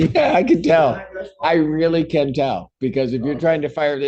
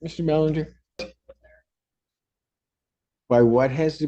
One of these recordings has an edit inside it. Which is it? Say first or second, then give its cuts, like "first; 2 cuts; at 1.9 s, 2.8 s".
second; 1 cut; at 1.0 s